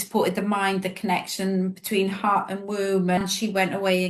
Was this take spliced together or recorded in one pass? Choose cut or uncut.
cut